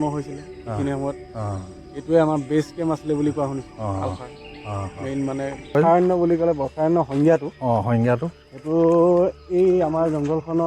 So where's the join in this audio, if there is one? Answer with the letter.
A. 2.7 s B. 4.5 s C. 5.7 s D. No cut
C